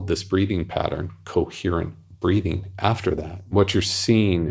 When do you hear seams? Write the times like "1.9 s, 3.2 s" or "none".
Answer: 3.4 s